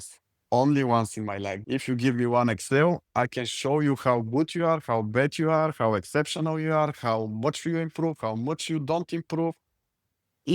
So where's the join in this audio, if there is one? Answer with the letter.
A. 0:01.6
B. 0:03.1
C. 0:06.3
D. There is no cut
A